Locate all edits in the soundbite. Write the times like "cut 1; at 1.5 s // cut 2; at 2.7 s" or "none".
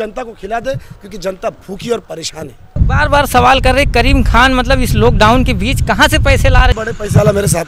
cut 1; at 2.7 s // cut 2; at 6.7 s